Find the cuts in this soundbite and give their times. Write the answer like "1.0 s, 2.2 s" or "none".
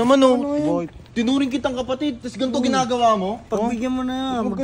1.0 s, 3.4 s